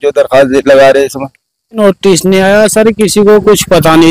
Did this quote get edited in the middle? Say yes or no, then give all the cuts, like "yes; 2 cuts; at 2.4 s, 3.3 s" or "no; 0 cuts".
yes; 1 cut; at 1.8 s